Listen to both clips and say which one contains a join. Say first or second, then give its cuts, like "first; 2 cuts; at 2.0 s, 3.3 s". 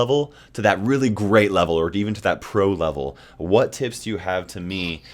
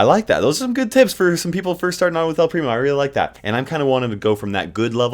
second; 1 cut; at 3.4 s